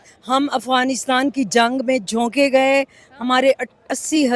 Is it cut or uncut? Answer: uncut